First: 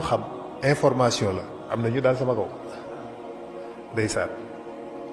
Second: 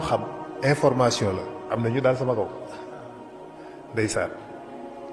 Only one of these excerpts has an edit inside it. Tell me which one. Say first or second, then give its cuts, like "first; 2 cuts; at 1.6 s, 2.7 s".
first; 3 cuts; at 2.5 s, 3.9 s, 4.3 s